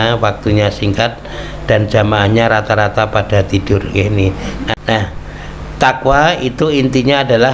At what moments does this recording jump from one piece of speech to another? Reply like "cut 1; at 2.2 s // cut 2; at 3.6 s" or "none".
cut 1; at 4.7 s